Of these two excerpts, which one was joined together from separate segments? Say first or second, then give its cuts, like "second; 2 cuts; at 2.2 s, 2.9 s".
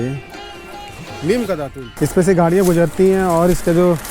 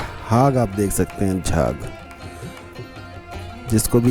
first; 1 cut; at 1.8 s